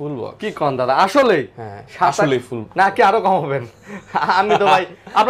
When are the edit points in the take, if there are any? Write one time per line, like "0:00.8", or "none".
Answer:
none